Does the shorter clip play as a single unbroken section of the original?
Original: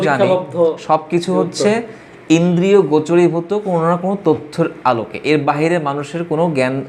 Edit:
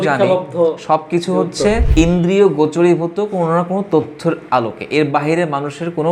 no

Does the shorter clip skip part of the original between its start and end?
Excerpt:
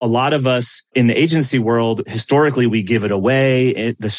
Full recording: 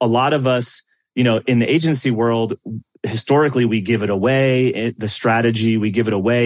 yes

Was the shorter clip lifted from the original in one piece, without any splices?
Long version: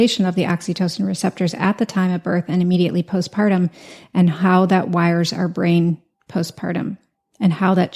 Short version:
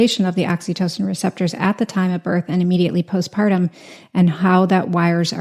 yes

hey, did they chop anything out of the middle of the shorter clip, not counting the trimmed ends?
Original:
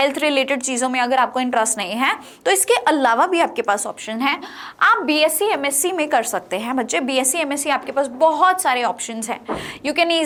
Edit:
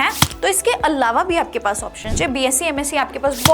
yes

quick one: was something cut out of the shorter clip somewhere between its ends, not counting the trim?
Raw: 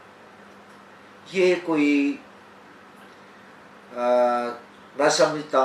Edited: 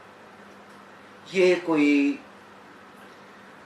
no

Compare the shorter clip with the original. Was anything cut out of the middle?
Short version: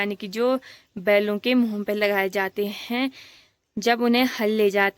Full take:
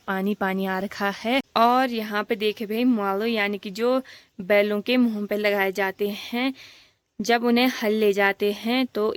no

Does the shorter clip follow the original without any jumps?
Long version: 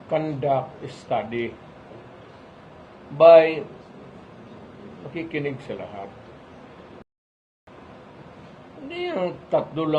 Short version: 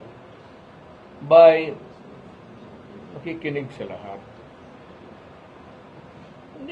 no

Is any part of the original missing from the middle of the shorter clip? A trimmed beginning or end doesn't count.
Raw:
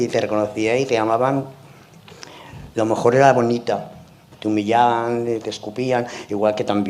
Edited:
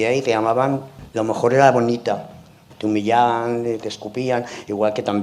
yes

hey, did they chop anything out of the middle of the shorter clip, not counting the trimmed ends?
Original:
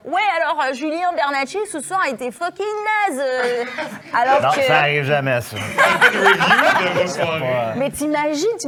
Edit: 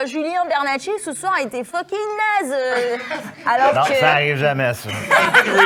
no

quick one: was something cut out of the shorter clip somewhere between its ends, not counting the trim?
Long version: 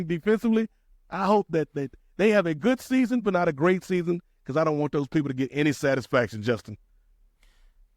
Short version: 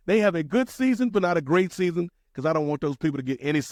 no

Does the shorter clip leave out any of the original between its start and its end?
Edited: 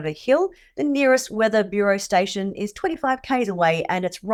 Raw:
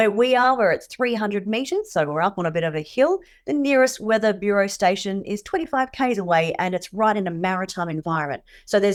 no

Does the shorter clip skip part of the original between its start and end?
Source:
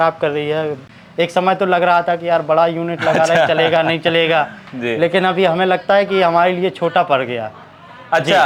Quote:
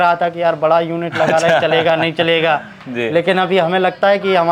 no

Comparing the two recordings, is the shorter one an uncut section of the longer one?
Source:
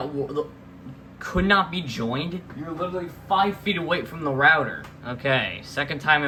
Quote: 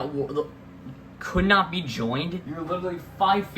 no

